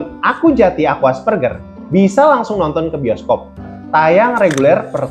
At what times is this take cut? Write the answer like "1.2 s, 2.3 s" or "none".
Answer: 3.8 s